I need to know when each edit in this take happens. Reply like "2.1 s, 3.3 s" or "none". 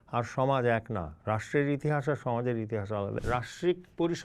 3.1 s